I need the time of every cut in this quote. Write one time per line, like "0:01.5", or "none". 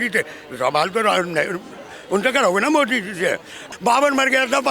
0:03.6